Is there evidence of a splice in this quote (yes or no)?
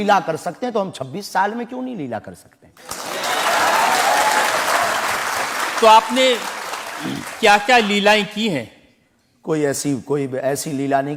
no